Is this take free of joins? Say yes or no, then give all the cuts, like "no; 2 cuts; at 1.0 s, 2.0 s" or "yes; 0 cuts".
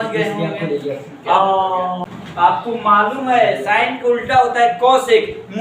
no; 1 cut; at 2.1 s